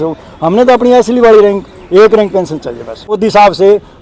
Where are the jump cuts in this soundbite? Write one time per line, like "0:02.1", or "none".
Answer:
0:03.1

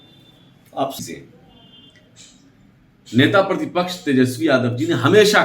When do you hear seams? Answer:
0:01.0

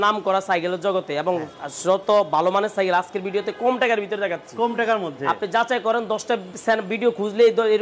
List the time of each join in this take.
none

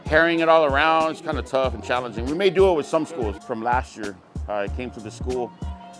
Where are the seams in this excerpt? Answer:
0:03.4

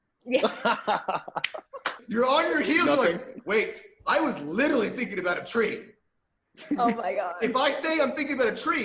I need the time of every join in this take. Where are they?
0:02.0

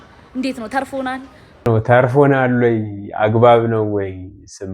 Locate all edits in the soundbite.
0:01.7

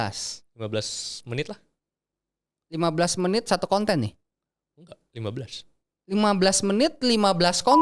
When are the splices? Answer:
none

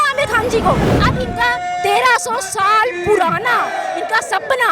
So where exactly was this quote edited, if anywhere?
0:00.9

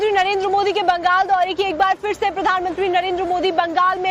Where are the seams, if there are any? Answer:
0:02.4

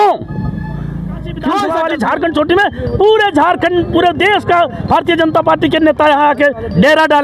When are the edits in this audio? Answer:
0:01.7

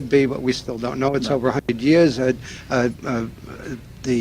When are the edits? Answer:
0:01.6

